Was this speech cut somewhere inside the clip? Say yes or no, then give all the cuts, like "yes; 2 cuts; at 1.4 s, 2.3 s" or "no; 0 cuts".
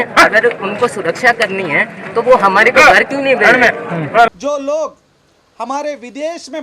yes; 1 cut; at 4.3 s